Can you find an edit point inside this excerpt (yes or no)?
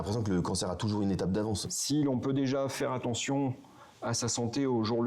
yes